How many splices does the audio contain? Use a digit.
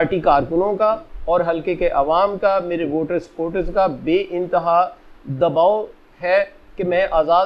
0